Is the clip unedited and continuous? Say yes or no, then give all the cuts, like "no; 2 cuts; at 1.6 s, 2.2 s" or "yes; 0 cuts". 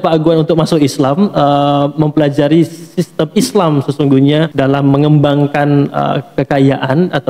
no; 1 cut; at 4.5 s